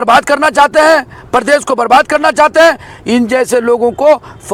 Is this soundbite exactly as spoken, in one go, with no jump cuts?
yes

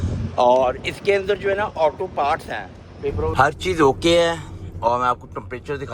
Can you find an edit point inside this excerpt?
yes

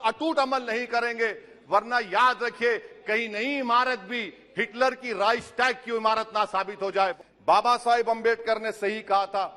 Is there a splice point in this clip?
yes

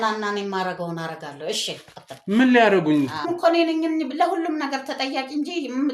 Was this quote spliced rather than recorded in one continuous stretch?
yes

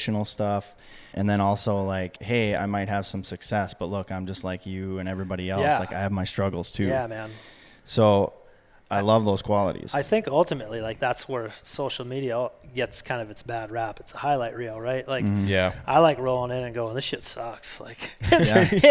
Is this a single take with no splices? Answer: no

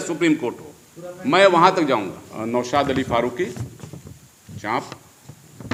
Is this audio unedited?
yes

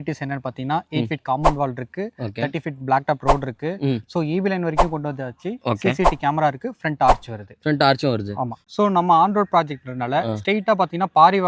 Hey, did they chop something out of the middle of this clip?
yes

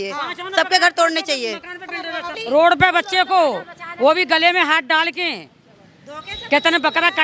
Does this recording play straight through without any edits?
no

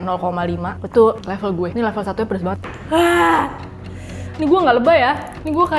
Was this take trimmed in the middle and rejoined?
yes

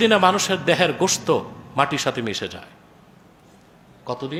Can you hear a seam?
no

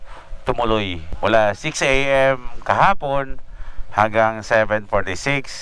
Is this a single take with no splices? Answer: no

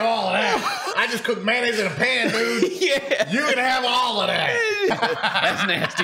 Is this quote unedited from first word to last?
no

